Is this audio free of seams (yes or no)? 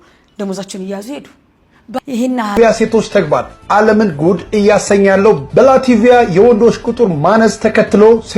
no